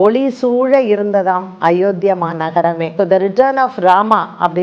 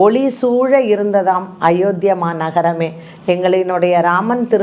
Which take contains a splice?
first; 1 cut; at 2.8 s

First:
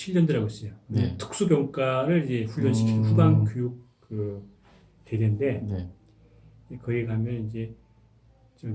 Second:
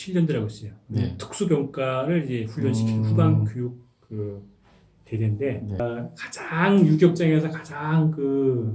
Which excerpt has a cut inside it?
second; 1 cut; at 5.8 s

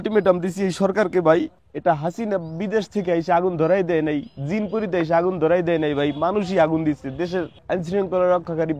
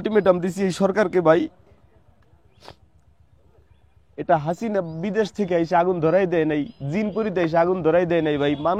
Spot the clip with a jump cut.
first; 2 cuts; at 1.6 s, 7.6 s

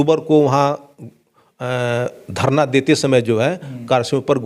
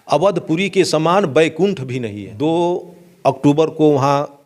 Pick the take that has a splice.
second; 1 cut; at 2.2 s

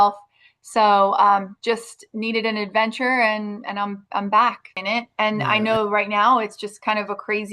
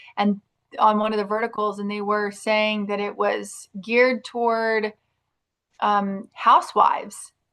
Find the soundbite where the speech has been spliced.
first; 1 cut; at 4.7 s

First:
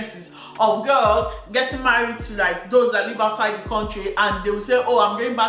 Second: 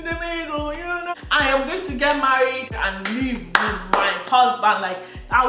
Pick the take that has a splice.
second; 2 cuts; at 1.1 s, 2.7 s

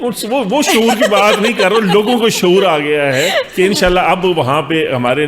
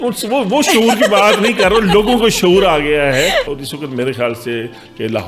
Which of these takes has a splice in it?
second; 1 cut; at 3.5 s

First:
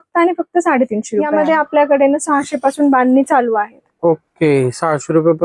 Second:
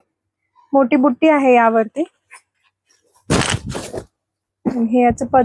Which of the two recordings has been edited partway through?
first; 1 cut; at 1.3 s

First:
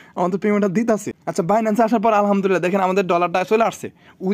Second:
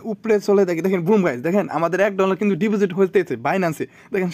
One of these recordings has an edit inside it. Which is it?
first; 1 cut; at 1.5 s

